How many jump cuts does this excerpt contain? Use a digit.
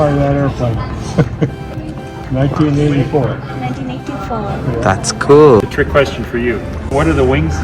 2